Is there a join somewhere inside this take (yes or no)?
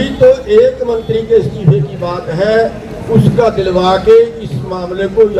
no